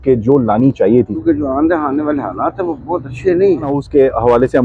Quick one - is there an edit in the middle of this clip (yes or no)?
yes